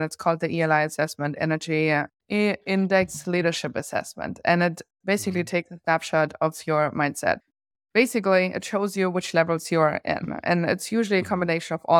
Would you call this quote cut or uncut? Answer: uncut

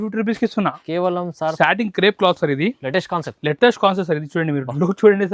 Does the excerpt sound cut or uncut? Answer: cut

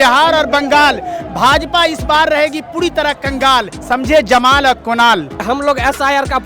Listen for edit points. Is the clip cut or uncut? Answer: cut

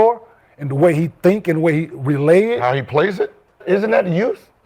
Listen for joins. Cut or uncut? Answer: cut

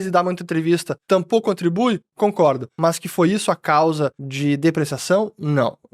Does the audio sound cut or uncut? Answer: cut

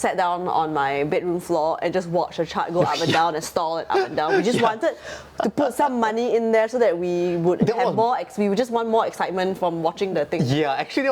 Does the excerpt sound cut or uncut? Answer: uncut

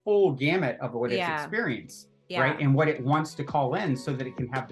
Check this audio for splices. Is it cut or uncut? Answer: uncut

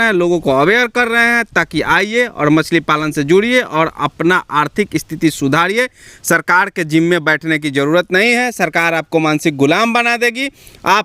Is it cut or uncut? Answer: uncut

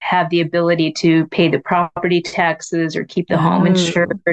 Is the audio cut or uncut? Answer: uncut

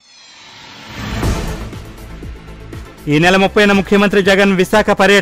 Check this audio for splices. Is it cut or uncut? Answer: cut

